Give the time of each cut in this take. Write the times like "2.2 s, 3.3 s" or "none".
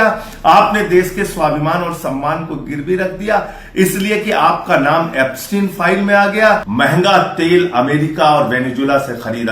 6.7 s